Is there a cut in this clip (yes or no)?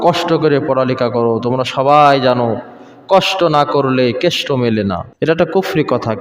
yes